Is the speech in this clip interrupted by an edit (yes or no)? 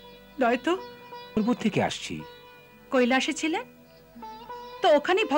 yes